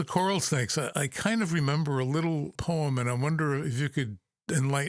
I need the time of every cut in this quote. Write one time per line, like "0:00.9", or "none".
0:00.9
0:02.6